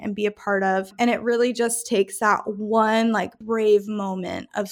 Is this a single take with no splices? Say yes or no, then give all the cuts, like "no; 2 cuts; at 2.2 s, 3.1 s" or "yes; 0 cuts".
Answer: no; 2 cuts; at 0.9 s, 3.4 s